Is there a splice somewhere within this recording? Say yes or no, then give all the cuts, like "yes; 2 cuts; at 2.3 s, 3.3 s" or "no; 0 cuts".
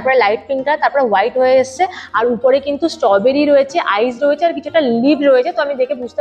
no; 0 cuts